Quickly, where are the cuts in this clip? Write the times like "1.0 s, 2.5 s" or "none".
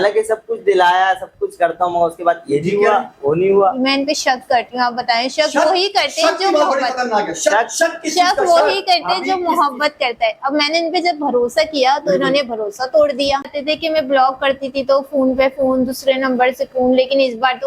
13.5 s

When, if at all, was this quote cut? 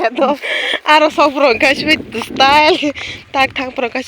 none

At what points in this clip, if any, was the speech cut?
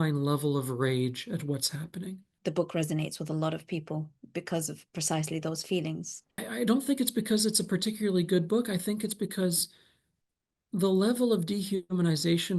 2.3 s, 6.4 s

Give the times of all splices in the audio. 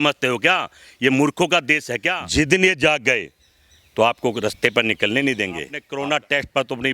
2.1 s, 5.8 s

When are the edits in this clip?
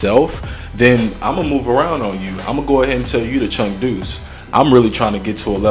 none

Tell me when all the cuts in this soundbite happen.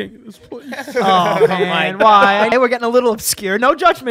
2.5 s

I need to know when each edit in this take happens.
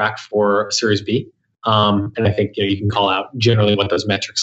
none

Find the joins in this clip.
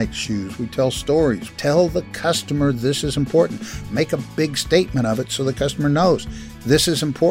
1.5 s, 3.9 s

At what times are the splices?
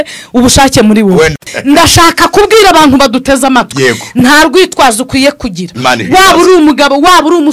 1.3 s

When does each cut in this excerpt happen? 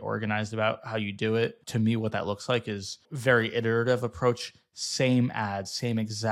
1.6 s, 3.1 s

